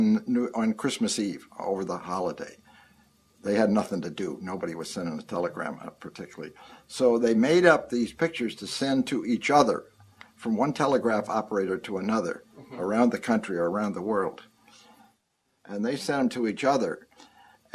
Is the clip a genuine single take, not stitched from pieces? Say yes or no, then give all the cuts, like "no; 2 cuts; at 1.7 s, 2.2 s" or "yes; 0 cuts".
no; 1 cut; at 8.3 s